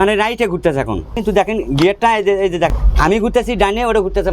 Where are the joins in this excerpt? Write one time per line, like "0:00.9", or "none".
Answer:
0:01.2
0:02.7